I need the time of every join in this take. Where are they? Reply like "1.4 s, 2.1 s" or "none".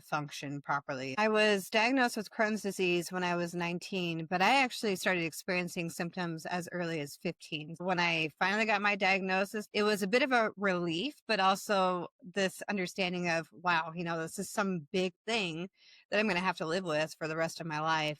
1.2 s, 7.8 s, 9.6 s